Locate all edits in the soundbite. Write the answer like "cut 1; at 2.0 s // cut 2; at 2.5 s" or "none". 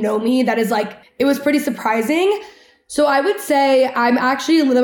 cut 1; at 1.0 s